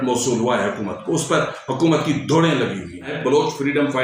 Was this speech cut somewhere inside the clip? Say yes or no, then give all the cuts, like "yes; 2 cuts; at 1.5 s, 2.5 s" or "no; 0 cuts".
yes; 1 cut; at 3.1 s